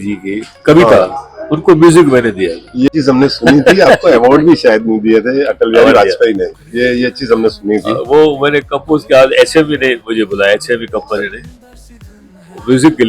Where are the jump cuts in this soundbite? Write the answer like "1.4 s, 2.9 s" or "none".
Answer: 2.9 s